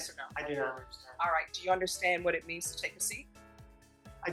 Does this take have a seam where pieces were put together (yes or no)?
no